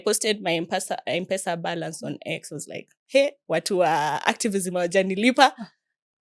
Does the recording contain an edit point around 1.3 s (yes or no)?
no